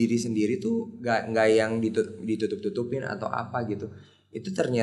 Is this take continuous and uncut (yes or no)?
no